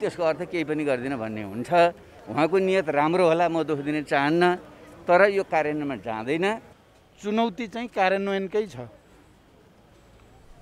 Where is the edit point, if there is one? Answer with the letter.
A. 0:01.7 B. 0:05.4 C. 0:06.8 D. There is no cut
C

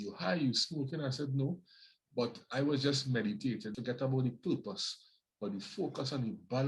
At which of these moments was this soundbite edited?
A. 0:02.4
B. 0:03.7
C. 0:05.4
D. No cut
B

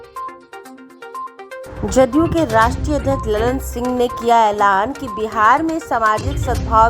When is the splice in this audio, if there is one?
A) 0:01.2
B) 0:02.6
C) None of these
C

